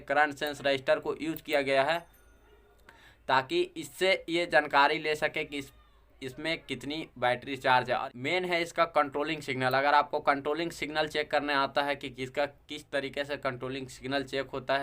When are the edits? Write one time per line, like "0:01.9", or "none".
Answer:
0:08.1